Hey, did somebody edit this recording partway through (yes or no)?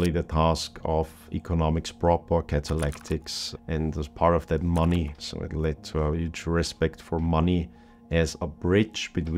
no